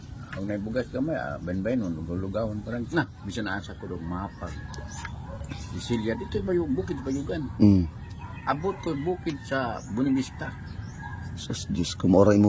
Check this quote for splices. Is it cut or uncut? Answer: cut